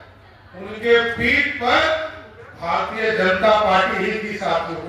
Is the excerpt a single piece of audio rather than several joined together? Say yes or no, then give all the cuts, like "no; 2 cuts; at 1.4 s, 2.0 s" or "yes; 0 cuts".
yes; 0 cuts